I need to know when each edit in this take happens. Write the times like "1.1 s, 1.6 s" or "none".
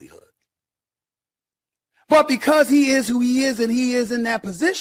none